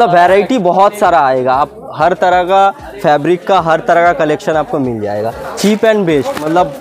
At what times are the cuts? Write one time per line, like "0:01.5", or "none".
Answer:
0:05.5